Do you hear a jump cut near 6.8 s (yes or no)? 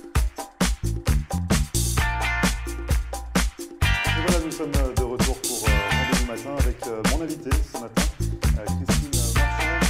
no